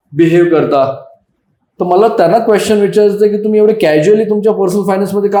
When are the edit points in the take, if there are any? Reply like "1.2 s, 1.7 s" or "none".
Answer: none